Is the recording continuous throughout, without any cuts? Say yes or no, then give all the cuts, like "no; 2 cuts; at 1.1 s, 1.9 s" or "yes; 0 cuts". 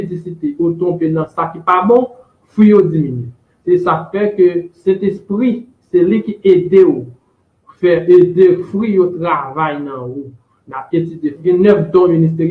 no; 1 cut; at 11.4 s